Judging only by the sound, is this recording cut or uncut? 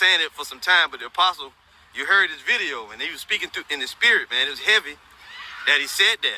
cut